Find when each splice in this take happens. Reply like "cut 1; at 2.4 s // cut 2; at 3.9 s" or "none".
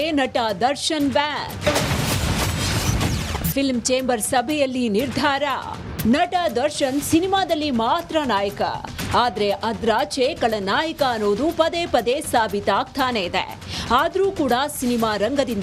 cut 1; at 8.8 s